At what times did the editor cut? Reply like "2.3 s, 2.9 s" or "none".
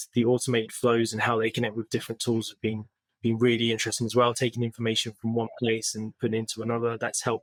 none